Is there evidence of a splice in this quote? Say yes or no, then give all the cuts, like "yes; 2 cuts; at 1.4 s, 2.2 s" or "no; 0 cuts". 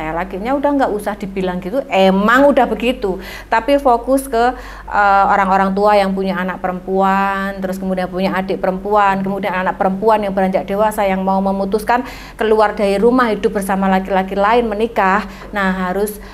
no; 0 cuts